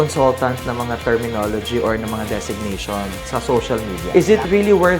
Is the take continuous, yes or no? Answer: no